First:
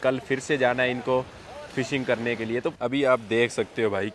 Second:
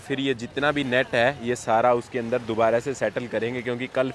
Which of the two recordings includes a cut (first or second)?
first